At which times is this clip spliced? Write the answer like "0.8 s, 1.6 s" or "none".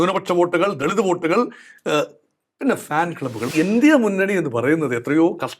3.5 s